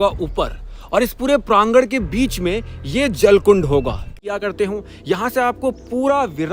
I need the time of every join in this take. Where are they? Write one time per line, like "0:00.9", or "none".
0:04.2

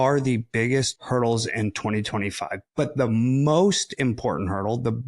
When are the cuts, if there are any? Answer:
0:01.0

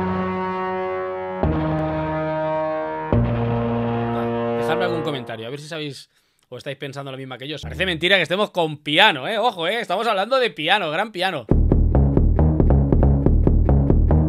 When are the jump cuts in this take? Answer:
0:01.2
0:07.6

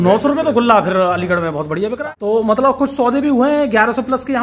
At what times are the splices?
0:02.0

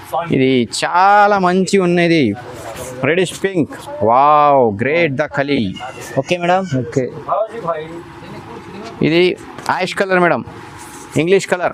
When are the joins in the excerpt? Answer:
none

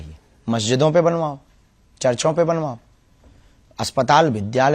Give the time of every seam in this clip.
none

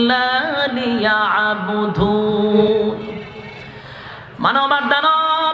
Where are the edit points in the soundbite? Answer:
0:02.6

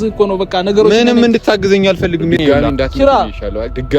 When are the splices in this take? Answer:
0:02.5

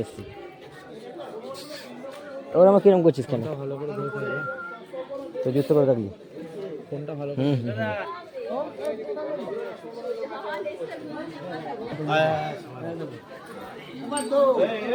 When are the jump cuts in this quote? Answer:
none

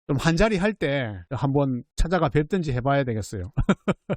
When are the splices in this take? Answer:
0:01.2
0:01.9

